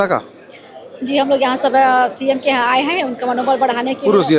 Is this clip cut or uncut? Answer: uncut